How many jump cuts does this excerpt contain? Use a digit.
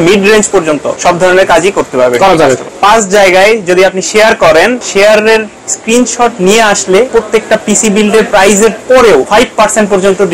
5